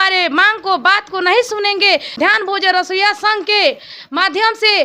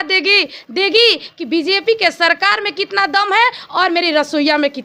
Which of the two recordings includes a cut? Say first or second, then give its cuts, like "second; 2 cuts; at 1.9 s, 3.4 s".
first; 1 cut; at 2.2 s